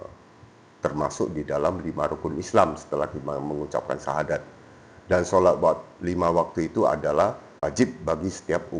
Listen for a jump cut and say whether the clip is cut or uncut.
cut